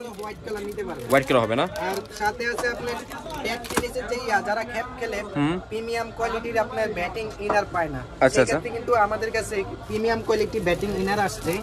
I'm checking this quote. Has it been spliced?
no; 0 cuts

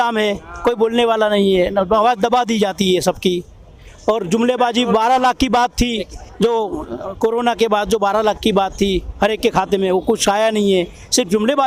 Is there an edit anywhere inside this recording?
no; 0 cuts

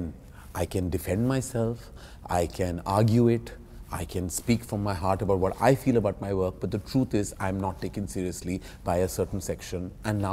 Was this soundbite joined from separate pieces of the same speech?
no; 0 cuts

